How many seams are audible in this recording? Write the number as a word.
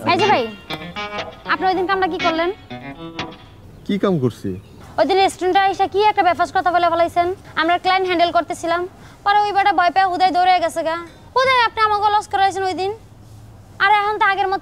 zero